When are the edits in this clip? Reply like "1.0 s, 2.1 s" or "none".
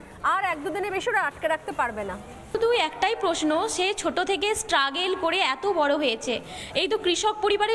2.5 s